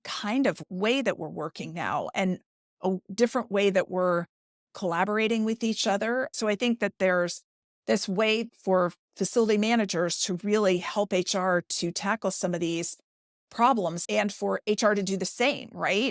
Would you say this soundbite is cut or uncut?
cut